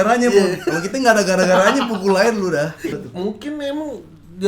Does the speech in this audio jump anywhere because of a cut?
yes; 1 cut; at 2.9 s

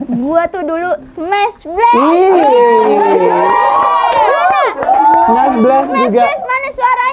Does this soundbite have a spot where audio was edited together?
no; 0 cuts

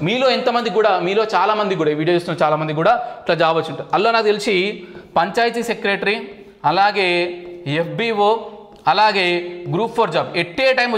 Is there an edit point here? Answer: no; 0 cuts

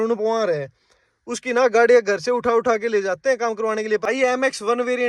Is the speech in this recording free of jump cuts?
no; 1 cut; at 4.0 s

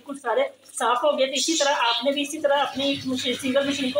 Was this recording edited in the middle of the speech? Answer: no; 0 cuts

